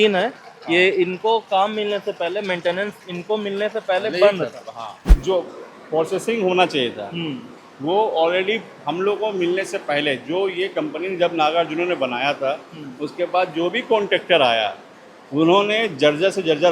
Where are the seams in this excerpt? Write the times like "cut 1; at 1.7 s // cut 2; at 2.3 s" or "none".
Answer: cut 1; at 5.1 s

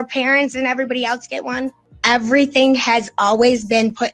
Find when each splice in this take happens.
cut 1; at 1.9 s

